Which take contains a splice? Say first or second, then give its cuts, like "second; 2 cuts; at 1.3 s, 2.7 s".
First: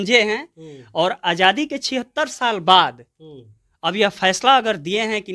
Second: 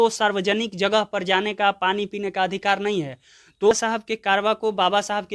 second; 1 cut; at 3.7 s